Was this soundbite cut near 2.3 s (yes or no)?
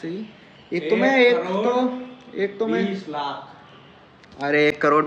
no